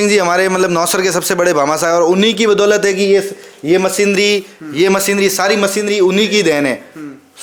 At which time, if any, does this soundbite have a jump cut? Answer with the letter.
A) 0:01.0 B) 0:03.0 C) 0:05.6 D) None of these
D